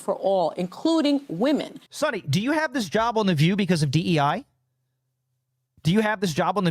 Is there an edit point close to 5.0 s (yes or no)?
no